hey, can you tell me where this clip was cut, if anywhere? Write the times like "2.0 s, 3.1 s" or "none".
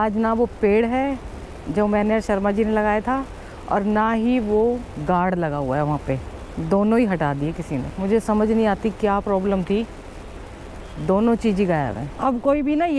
none